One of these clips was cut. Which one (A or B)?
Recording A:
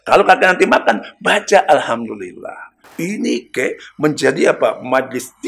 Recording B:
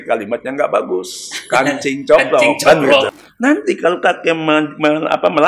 B